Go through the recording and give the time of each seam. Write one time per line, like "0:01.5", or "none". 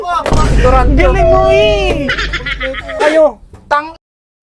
0:03.0